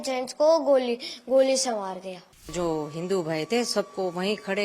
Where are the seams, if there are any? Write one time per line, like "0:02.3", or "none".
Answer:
0:02.5